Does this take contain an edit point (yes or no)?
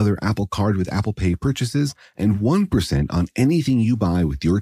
no